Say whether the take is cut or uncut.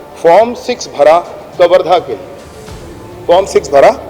uncut